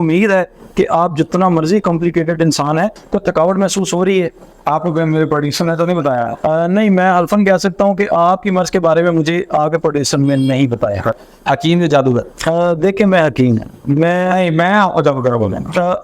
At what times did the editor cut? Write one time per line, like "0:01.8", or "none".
0:02.9
0:11.2